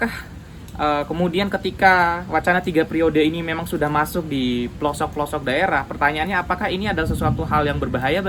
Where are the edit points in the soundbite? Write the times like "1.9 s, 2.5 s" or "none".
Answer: none